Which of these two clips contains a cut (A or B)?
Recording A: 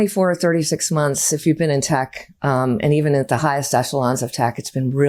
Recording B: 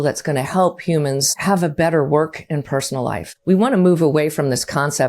B